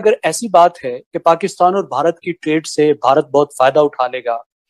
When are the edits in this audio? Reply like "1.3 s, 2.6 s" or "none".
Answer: none